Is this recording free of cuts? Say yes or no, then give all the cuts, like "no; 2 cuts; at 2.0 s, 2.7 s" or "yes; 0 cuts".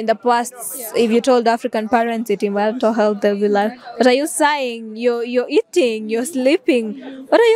yes; 0 cuts